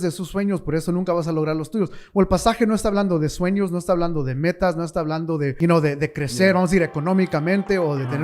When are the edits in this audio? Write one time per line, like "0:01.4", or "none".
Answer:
0:05.6